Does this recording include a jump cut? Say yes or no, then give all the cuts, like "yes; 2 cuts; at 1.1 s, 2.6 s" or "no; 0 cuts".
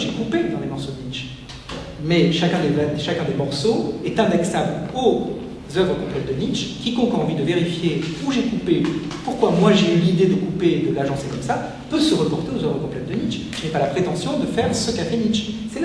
no; 0 cuts